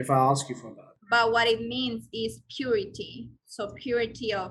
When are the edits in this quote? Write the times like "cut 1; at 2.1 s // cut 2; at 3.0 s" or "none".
cut 1; at 0.9 s